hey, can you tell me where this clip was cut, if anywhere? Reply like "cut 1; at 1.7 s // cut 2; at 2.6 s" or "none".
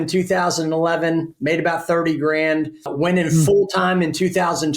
cut 1; at 2.9 s